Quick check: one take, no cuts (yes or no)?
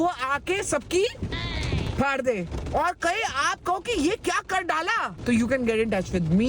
yes